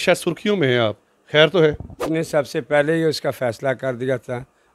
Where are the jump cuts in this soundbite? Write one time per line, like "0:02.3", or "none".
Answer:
0:02.1